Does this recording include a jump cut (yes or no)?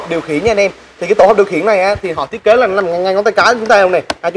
no